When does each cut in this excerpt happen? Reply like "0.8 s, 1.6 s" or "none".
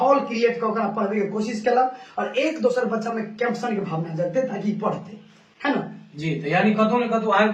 none

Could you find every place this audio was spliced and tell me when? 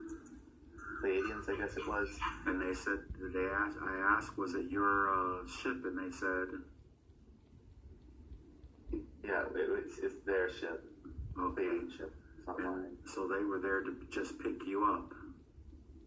5.2 s

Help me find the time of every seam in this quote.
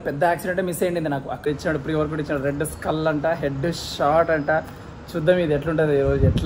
1.5 s

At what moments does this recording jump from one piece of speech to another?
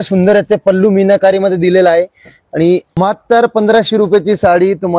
2.9 s

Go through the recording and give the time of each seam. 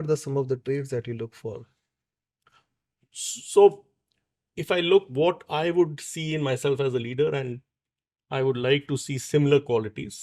none

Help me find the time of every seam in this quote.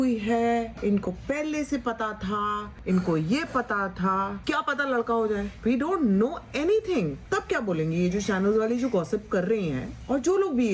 none

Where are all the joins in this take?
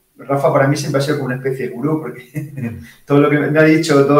none

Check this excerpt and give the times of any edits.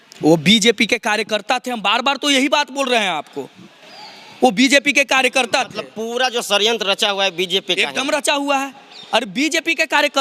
none

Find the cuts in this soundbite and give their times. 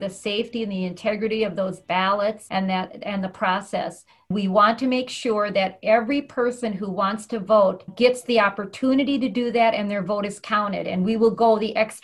2.4 s, 4.3 s, 7.9 s

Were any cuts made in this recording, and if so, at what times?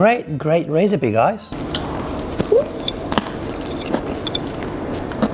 1.5 s

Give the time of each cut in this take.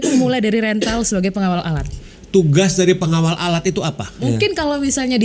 2.1 s, 4.1 s

